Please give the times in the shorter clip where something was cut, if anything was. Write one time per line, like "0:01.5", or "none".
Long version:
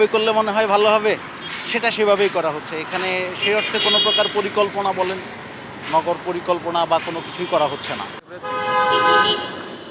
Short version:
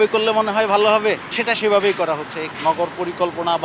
0:01.3
0:02.4